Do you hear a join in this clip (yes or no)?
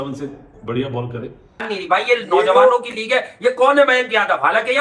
yes